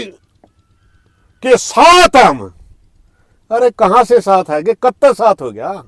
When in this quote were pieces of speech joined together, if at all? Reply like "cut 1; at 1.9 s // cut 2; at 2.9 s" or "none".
none